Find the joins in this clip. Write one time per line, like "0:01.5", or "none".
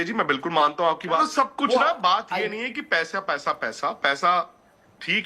0:01.2